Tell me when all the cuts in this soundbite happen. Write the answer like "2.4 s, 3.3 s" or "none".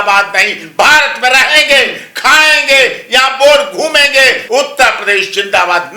4.4 s